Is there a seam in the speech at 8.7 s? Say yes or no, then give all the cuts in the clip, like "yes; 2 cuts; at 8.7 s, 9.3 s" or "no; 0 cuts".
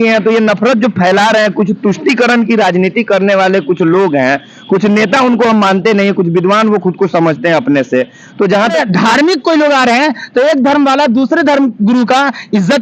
yes; 1 cut; at 8.7 s